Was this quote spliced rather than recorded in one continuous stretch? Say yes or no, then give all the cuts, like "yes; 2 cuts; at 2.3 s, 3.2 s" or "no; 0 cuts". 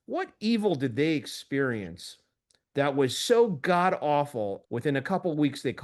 yes; 1 cut; at 4.6 s